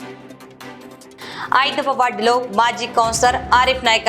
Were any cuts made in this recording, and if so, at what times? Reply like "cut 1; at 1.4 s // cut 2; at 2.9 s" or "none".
cut 1; at 1.1 s